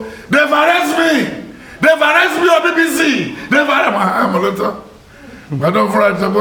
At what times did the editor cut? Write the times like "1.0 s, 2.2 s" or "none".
none